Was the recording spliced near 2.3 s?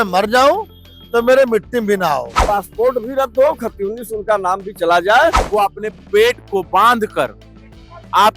yes; 2 cuts; at 2.3 s, 5.4 s

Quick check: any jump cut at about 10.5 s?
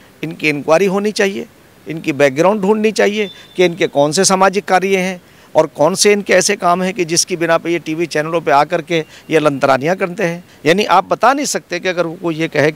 yes; 1 cut; at 10.5 s

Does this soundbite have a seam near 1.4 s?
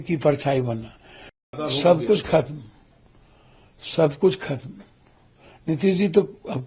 yes; 1 cut; at 1.4 s

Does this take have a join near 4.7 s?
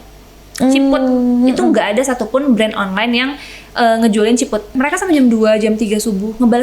yes; 1 cut; at 4.7 s

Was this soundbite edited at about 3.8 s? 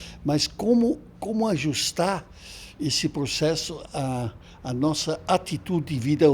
no; 0 cuts

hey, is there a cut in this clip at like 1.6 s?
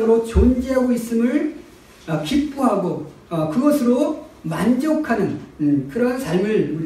no; 0 cuts

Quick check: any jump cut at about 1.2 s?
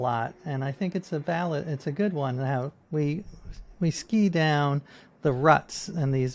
no; 0 cuts

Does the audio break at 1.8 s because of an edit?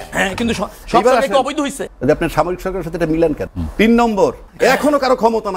yes; 3 cuts; at 1.8 s, 3.6 s, 4.4 s

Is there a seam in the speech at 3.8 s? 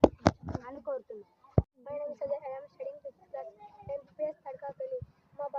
no; 1 cut; at 1.8 s

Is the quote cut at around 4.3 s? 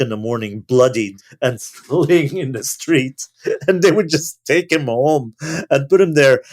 no; 1 cut; at 1.2 s

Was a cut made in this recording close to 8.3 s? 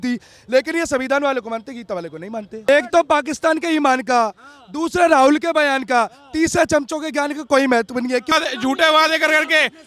yes; 2 cuts; at 2.7 s, 8.3 s

